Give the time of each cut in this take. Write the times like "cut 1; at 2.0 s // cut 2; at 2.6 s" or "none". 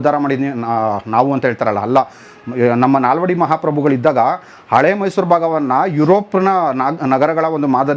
none